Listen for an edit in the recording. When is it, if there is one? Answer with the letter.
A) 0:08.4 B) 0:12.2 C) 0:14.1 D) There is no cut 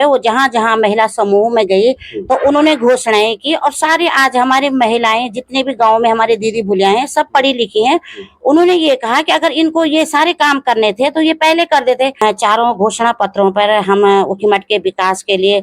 B